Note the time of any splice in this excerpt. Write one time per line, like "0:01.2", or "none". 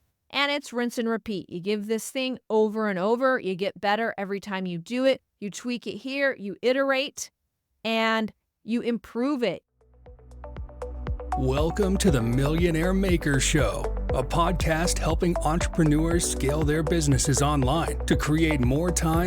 0:09.6